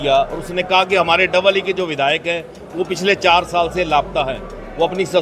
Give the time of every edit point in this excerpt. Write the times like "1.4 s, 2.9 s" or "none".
none